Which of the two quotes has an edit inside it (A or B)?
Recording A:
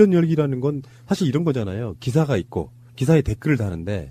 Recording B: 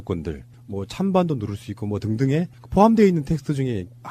A